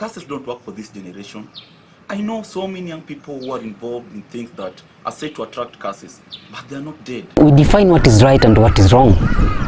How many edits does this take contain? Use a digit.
0